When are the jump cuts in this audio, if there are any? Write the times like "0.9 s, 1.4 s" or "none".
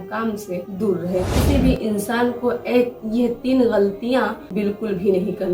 1.3 s, 4.4 s